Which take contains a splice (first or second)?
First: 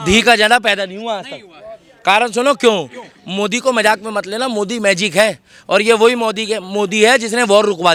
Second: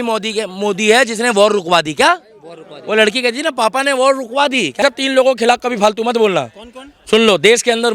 second